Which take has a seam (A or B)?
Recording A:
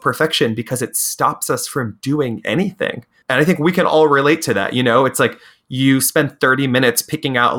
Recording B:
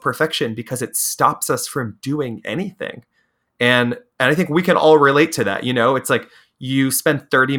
A